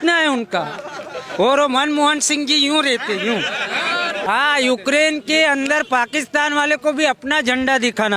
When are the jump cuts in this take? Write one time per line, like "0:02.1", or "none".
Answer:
0:04.3